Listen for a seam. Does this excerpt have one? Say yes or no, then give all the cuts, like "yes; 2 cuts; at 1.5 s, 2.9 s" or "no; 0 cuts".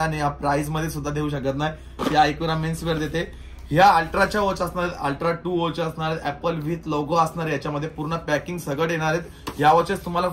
no; 0 cuts